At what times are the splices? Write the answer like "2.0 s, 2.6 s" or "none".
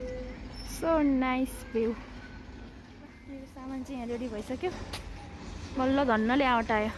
3.2 s